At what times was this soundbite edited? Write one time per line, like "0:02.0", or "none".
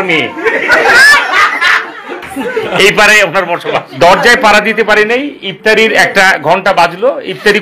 0:03.9